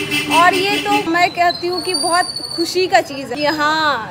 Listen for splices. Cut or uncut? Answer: cut